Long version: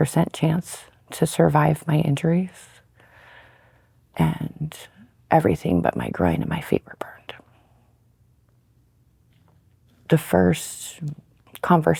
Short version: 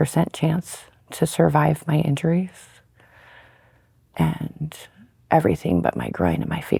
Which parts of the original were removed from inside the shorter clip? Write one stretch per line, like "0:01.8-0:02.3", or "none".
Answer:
none